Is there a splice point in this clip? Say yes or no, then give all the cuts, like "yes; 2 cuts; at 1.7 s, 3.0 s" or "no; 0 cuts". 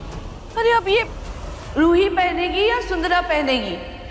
no; 0 cuts